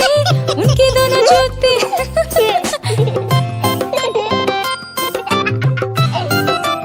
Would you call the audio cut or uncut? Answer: uncut